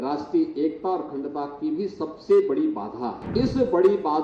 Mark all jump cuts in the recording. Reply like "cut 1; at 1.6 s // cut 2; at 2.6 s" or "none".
cut 1; at 3.2 s